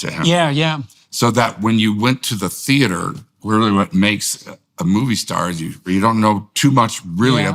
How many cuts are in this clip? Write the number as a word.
one